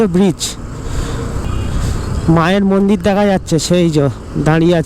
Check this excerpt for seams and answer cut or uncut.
cut